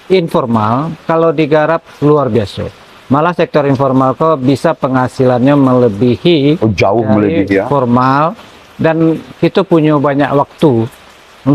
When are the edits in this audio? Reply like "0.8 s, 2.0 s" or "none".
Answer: none